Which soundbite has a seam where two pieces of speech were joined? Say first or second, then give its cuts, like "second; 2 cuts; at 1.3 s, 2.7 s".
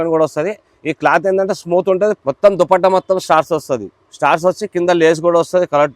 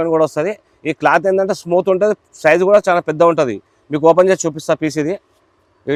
first; 1 cut; at 2.2 s